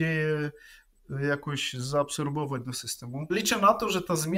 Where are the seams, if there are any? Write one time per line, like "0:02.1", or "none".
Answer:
0:03.3